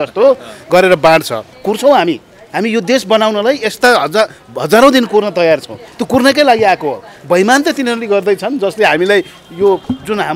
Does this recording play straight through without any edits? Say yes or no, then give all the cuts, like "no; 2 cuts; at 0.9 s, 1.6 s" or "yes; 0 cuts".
no; 1 cut; at 1.5 s